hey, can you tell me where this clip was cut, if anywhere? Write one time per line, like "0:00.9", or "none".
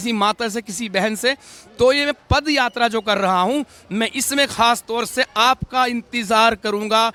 none